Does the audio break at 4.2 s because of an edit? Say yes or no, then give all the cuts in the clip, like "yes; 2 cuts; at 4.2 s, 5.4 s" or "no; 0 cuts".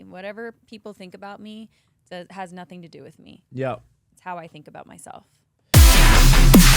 no; 1 cut; at 5.7 s